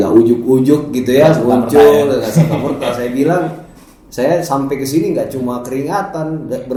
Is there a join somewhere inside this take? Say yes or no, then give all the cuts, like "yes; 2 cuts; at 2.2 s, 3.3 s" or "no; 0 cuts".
no; 0 cuts